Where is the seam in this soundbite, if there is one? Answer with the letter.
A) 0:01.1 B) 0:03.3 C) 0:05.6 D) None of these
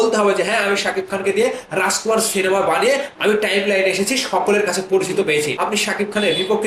C